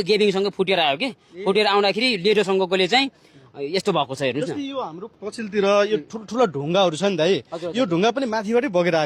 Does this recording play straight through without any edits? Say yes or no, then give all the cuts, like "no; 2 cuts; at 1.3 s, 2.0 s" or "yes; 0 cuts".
yes; 0 cuts